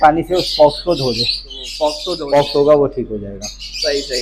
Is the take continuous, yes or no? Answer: no